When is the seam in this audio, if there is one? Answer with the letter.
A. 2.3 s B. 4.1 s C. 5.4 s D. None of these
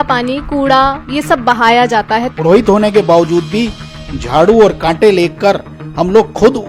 A